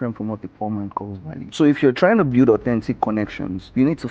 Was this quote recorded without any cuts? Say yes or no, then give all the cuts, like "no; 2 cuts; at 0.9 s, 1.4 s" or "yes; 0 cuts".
no; 1 cut; at 1.4 s